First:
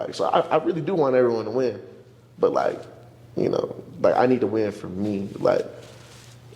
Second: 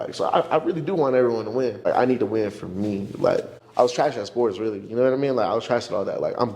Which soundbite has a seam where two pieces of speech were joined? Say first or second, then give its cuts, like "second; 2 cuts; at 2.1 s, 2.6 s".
second; 2 cuts; at 1.9 s, 3.6 s